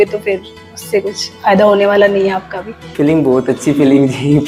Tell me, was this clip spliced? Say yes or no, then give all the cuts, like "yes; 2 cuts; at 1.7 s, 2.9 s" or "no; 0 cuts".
yes; 1 cut; at 2.9 s